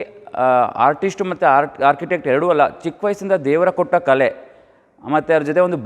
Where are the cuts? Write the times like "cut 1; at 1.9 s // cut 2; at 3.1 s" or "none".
none